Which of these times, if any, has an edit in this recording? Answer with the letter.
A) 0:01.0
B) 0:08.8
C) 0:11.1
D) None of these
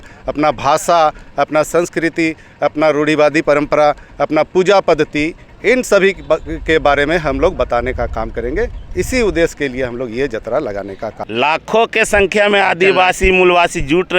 C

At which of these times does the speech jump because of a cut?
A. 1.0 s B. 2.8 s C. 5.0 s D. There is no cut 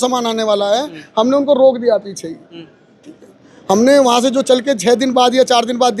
D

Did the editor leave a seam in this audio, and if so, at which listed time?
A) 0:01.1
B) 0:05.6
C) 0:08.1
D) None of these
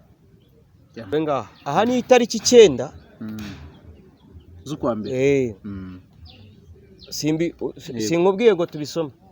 A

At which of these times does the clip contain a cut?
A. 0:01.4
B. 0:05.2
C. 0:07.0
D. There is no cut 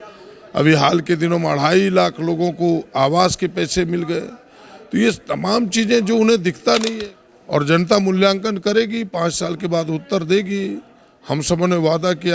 C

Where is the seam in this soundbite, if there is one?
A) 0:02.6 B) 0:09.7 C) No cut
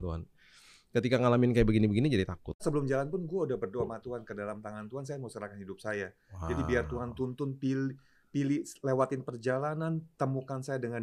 A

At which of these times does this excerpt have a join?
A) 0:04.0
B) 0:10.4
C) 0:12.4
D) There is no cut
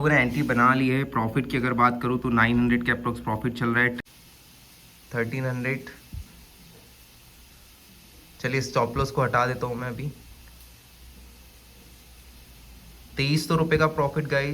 A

